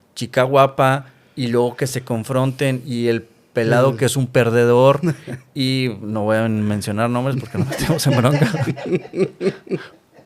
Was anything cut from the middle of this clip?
no; 0 cuts

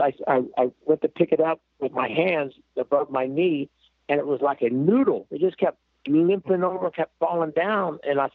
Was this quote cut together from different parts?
no; 0 cuts

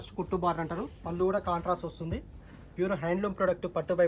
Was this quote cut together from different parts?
no; 0 cuts

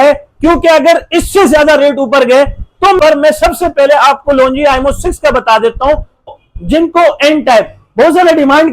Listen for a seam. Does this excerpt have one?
yes; 2 cuts; at 3.0 s, 6.3 s

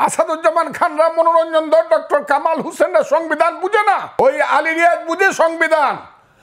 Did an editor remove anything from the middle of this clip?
yes; 1 cut; at 4.1 s

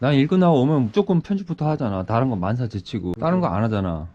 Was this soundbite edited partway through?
yes; 1 cut; at 3.2 s

